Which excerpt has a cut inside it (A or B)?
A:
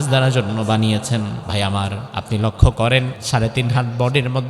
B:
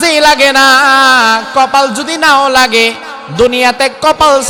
A